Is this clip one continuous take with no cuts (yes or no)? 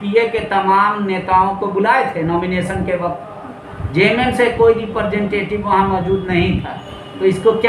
yes